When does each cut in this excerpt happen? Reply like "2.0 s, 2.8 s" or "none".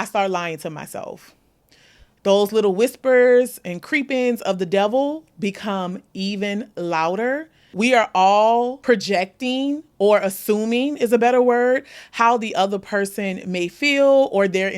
7.6 s, 8.8 s